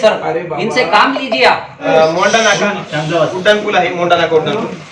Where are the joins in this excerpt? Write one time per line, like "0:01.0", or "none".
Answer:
0:01.8